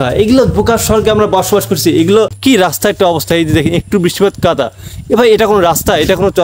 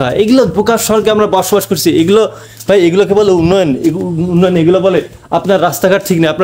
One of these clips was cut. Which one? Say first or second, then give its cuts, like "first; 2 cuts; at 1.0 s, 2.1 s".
first; 1 cut; at 2.3 s